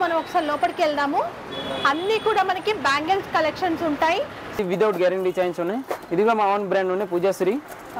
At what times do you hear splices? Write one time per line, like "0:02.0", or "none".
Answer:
0:04.6